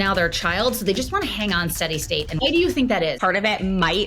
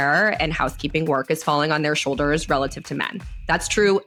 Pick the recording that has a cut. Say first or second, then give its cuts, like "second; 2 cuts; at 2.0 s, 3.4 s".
first; 2 cuts; at 2.4 s, 3.2 s